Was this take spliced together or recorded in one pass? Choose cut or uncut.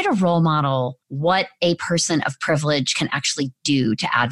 cut